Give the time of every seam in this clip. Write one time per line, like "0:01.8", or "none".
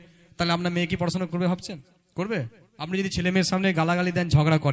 0:01.9
0:02.6

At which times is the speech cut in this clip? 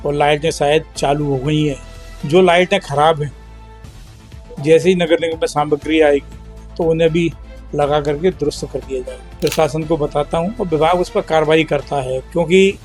0:09.2

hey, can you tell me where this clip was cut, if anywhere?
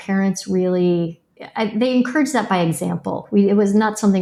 none

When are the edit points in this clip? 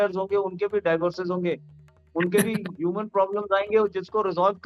none

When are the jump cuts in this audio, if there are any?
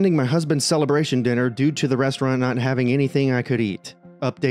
none

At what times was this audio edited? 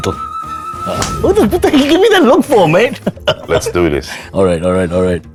none

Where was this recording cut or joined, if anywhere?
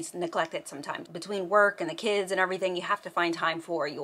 0:01.1

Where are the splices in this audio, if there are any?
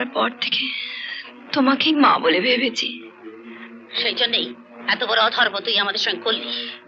none

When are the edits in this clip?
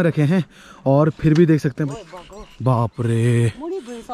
0:01.8

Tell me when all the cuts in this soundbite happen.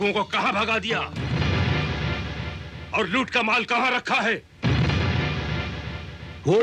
none

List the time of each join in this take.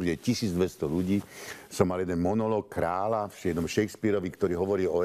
0:01.1

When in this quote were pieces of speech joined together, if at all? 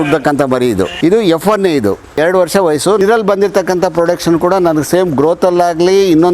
0:00.9
0:02.2
0:03.0

